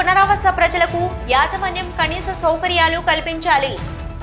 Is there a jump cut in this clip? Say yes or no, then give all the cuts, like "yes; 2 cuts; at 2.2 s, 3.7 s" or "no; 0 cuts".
no; 0 cuts